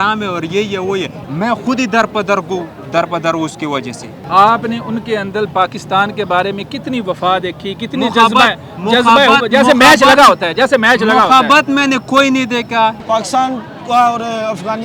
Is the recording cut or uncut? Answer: cut